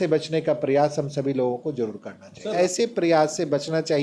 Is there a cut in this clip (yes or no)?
yes